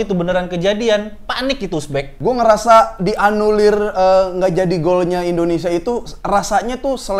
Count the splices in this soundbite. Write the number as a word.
one